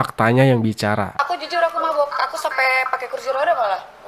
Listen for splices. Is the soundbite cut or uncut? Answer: uncut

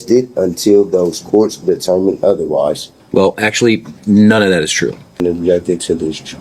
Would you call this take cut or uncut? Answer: cut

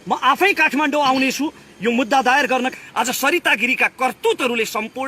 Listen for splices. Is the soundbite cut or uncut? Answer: cut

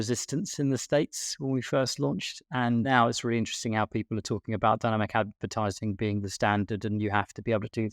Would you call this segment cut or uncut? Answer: cut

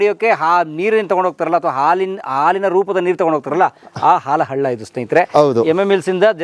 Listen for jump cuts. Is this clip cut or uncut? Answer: uncut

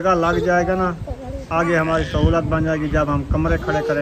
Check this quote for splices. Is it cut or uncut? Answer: uncut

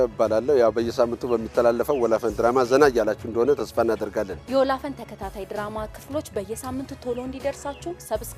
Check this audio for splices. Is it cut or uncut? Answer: uncut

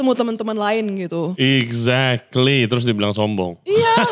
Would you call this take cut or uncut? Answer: uncut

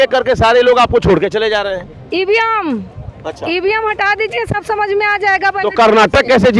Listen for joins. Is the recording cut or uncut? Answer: uncut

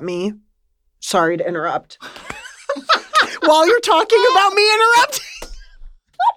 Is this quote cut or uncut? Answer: uncut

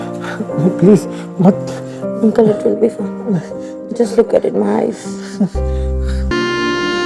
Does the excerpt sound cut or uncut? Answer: uncut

